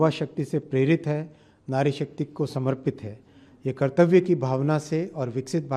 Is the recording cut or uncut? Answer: cut